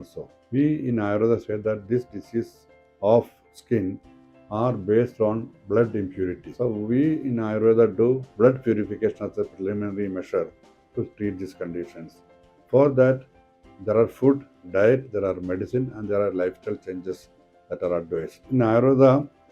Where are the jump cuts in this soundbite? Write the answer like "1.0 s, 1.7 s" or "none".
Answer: 6.5 s, 18.4 s